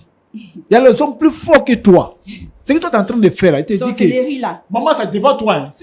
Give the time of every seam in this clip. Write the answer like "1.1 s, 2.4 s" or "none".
none